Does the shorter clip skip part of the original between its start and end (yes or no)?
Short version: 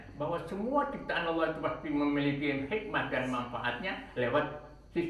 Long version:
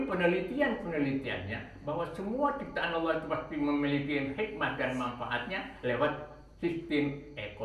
no